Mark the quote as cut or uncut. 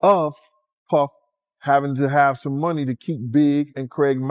uncut